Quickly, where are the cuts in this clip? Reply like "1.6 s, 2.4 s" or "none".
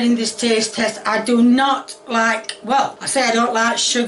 3.0 s